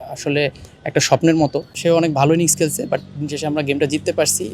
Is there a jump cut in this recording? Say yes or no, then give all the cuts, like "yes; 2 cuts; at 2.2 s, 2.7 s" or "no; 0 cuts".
yes; 1 cut; at 1.7 s